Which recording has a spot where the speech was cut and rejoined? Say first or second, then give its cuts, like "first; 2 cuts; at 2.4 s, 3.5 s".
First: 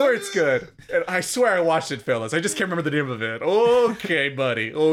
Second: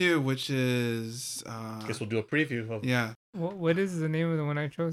second; 1 cut; at 3.2 s